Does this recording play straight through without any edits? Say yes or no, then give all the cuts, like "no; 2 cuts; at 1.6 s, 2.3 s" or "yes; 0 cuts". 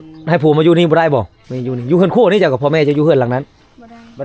yes; 0 cuts